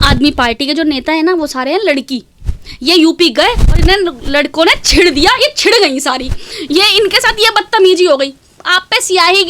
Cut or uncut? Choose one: uncut